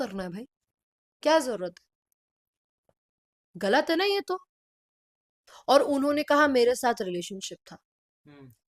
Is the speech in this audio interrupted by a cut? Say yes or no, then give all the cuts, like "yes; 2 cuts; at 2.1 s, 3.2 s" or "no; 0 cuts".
no; 0 cuts